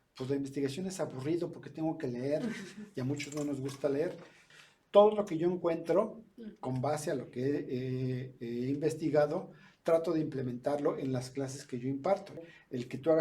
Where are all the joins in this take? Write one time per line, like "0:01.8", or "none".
0:04.4
0:12.4